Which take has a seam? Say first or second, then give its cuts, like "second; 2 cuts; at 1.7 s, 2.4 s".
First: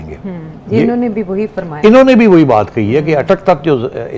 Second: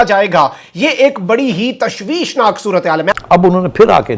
second; 1 cut; at 3.2 s